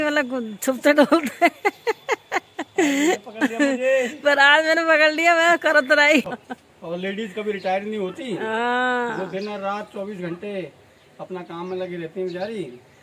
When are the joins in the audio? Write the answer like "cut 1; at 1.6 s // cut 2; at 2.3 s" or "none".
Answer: cut 1; at 6.3 s